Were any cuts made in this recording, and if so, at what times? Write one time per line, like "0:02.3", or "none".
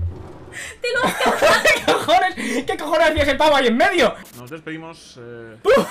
none